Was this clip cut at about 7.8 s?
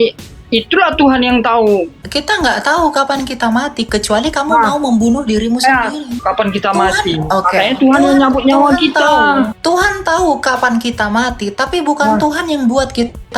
no; 3 cuts; at 2.0 s, 6.1 s, 9.6 s

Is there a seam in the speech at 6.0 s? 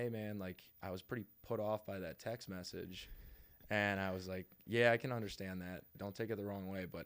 yes; 1 cut; at 6.0 s

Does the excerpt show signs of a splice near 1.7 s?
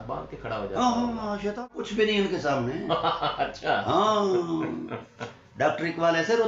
yes; 1 cut; at 1.7 s

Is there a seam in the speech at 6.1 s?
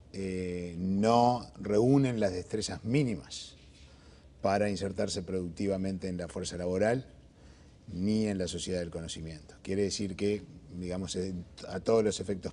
yes; 1 cut; at 6.1 s

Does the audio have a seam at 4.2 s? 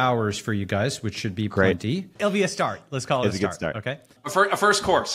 yes; 2 cuts; at 2.2 s, 4.2 s

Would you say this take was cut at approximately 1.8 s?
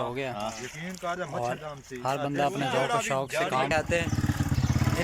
no; 1 cut; at 3.7 s

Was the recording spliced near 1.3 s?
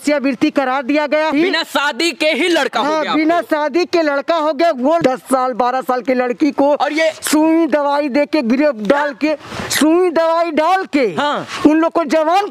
yes; 2 cuts; at 1.3 s, 5.0 s

